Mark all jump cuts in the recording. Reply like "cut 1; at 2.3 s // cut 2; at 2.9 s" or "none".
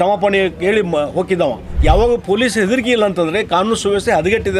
cut 1; at 1.7 s